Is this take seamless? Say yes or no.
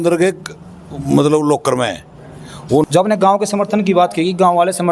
no